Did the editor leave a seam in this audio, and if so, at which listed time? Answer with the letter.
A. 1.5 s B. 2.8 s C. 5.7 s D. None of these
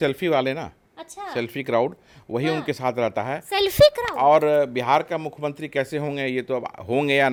D